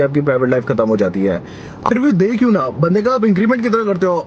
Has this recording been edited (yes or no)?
yes